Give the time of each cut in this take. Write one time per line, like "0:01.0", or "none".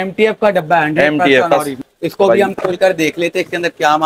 0:01.7